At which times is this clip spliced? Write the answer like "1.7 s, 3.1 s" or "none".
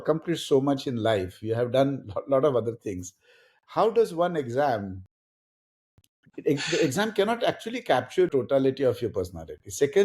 8.3 s